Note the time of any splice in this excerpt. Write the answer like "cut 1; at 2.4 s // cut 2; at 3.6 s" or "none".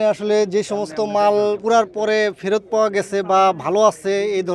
cut 1; at 1.6 s

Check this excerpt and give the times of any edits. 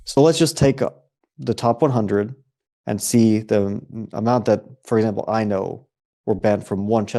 none

